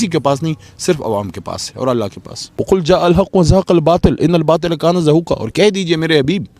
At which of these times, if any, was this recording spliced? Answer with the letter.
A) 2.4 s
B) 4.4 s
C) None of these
A